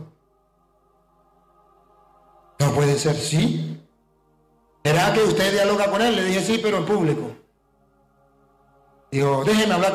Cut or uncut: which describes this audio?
uncut